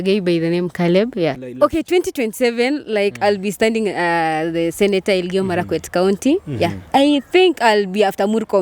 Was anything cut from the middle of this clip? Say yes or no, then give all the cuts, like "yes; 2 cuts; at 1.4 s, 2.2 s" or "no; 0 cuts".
yes; 1 cut; at 1.3 s